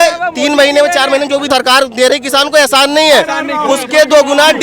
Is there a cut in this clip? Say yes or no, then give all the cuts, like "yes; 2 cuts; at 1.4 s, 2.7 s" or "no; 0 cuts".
yes; 1 cut; at 1.5 s